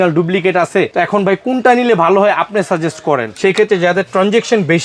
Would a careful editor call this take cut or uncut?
cut